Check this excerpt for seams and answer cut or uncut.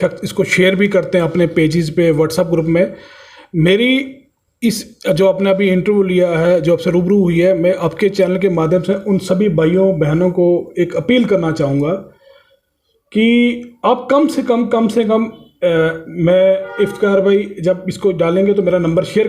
uncut